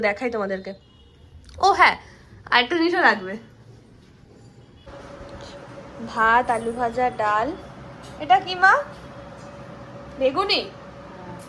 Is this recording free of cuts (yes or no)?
no